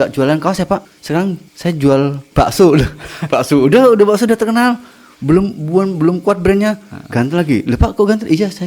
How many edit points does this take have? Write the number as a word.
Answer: two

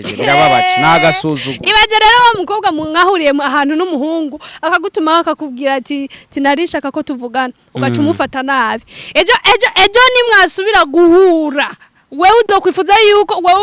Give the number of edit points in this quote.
zero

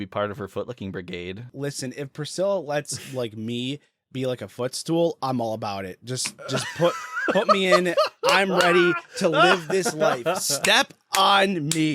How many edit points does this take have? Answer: one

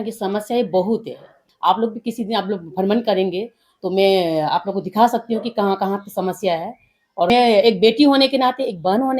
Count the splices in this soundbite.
two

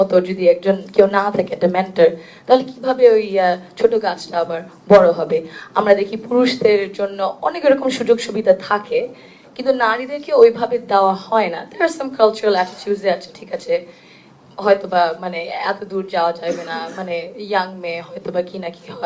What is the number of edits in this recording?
zero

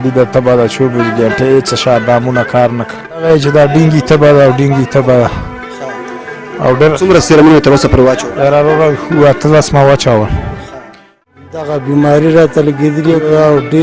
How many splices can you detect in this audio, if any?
two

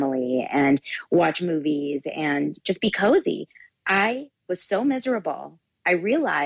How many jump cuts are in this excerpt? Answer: two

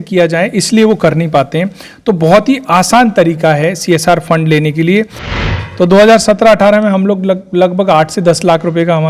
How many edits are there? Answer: one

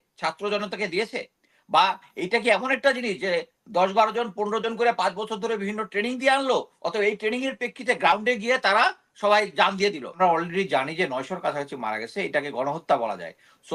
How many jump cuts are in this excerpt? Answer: one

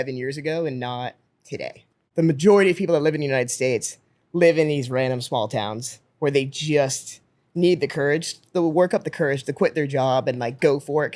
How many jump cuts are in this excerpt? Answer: one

